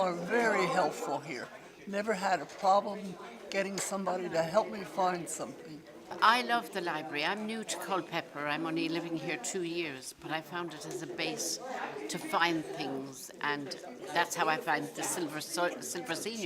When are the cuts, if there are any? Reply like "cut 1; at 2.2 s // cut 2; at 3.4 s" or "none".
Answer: cut 1; at 6.1 s